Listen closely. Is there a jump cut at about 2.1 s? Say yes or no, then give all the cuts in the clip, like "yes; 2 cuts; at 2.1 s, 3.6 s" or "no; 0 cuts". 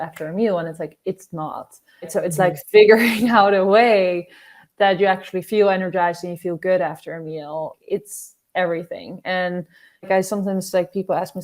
yes; 3 cuts; at 2.1 s, 7.8 s, 10.1 s